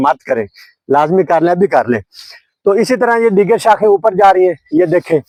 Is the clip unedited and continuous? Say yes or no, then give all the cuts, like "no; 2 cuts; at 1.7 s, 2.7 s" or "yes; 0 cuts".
yes; 0 cuts